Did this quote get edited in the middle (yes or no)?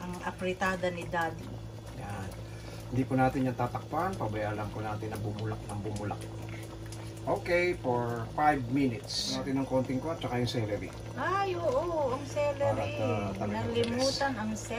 yes